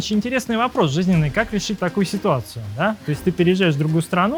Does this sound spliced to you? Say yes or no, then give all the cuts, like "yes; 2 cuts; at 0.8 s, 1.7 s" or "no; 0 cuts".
no; 0 cuts